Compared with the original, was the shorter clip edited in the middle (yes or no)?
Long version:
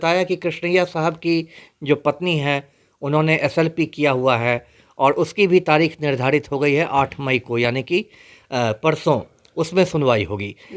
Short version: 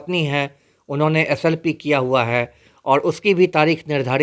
no